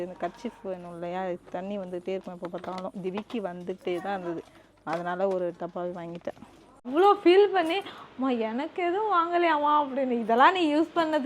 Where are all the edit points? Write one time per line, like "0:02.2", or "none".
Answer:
0:06.9